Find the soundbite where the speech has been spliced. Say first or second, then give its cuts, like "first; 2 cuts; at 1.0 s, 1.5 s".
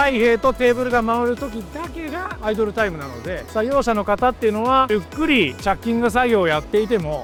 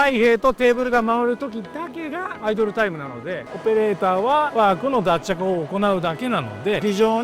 second; 1 cut; at 3.5 s